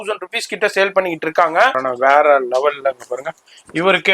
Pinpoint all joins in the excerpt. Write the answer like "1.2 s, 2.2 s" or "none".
1.9 s